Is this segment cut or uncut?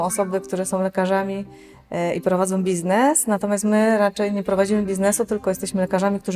uncut